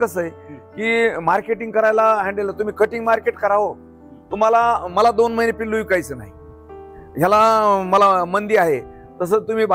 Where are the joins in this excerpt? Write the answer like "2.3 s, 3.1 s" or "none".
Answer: none